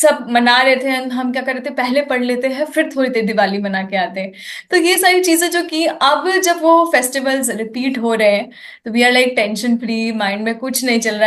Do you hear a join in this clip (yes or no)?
no